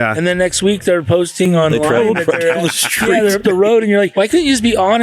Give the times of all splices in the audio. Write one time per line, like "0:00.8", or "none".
0:04.1